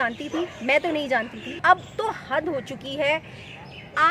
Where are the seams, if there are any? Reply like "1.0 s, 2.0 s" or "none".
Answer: 1.6 s